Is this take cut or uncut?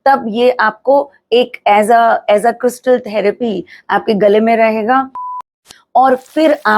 cut